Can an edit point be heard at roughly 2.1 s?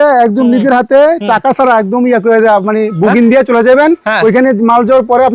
no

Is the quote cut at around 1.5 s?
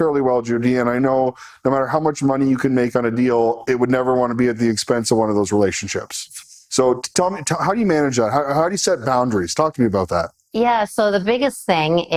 no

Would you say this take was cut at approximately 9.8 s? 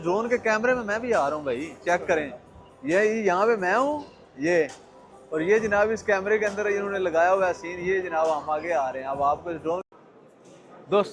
yes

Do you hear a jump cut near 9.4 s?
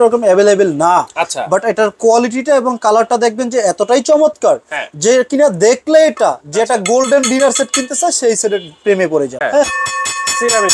yes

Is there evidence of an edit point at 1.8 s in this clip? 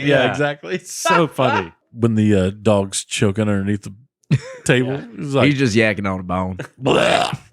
yes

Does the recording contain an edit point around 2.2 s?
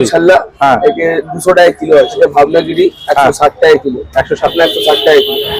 yes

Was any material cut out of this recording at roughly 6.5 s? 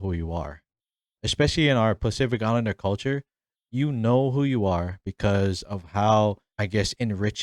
yes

